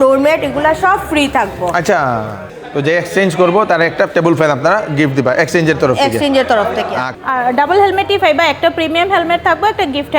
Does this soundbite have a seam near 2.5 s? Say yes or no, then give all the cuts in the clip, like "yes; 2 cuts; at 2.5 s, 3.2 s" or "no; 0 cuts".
yes; 2 cuts; at 2.5 s, 7.1 s